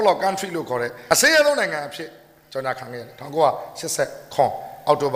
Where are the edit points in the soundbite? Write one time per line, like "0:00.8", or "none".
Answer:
0:00.9